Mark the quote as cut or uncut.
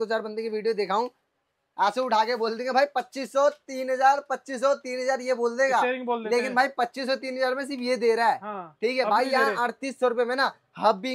uncut